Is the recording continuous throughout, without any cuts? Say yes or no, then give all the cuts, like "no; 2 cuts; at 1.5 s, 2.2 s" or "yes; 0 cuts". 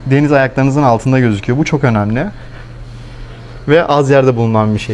yes; 0 cuts